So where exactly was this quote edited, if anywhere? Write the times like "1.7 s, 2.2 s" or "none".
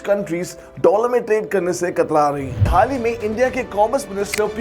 2.7 s

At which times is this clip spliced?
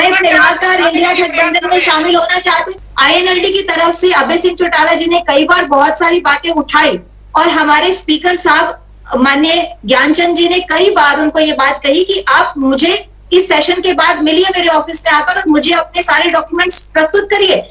2.7 s

